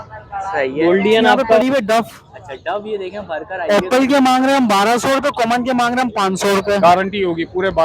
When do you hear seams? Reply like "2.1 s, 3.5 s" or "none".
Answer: 1.6 s, 6.8 s